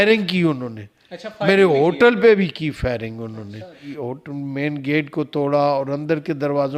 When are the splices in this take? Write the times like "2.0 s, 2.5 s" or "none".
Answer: 4.0 s